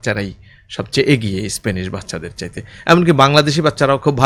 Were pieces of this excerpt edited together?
no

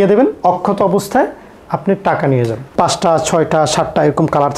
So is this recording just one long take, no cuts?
no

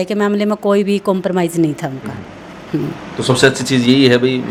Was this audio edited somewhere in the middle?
no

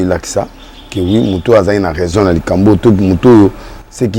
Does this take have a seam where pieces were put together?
no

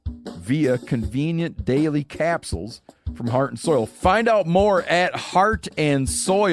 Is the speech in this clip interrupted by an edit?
no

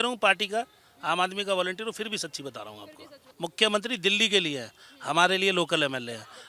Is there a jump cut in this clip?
yes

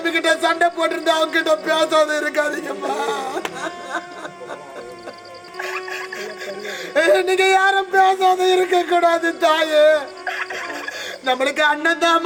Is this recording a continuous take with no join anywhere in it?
yes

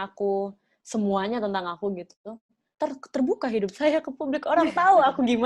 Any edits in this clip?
no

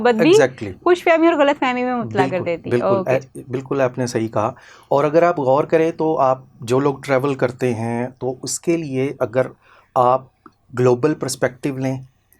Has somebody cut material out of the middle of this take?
no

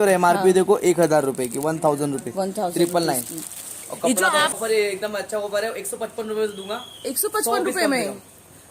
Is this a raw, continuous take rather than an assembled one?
no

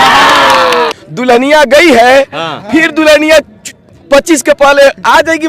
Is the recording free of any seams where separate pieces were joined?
no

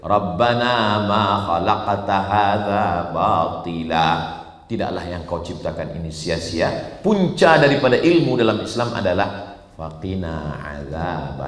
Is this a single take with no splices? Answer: yes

